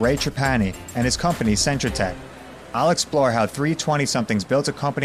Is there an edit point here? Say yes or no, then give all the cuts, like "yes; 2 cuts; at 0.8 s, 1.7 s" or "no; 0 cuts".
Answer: no; 0 cuts